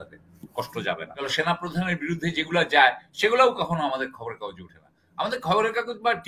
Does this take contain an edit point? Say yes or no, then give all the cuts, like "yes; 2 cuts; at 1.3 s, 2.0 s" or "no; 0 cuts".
yes; 1 cut; at 1.3 s